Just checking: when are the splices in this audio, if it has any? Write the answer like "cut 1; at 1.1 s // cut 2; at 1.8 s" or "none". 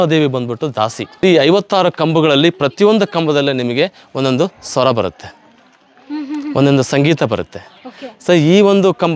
cut 1; at 1.0 s